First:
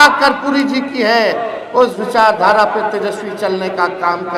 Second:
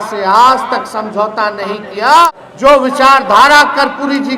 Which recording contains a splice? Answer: second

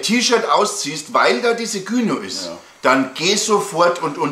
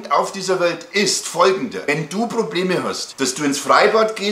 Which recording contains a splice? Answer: second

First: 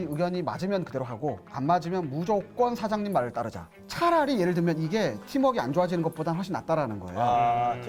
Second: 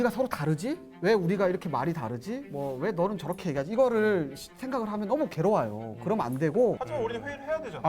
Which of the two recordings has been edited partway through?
second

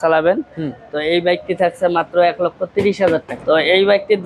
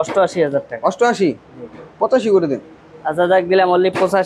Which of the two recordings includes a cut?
first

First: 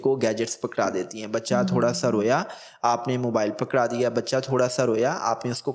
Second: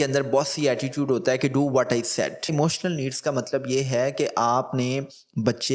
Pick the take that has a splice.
second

